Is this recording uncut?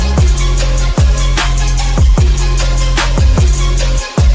no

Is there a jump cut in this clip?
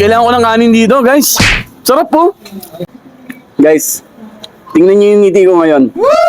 yes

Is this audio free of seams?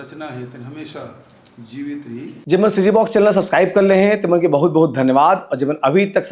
no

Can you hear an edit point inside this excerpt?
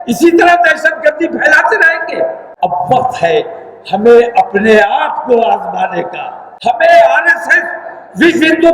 yes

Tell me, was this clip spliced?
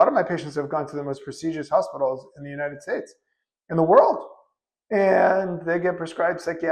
no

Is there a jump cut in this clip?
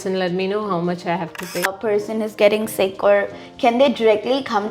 yes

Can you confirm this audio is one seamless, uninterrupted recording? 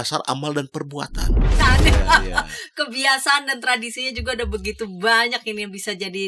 no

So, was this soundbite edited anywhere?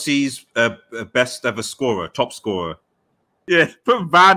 yes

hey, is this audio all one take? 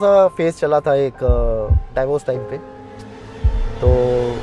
yes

